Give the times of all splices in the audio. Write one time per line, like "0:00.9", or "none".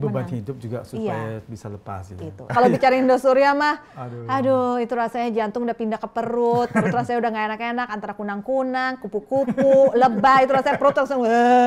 0:02.5